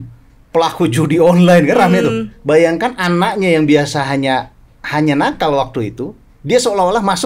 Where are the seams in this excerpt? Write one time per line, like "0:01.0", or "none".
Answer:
none